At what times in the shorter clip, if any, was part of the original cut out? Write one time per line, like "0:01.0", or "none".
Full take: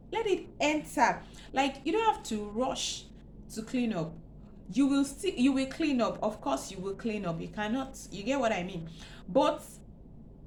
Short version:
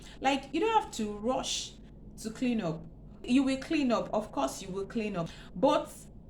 0:03.3
0:05.4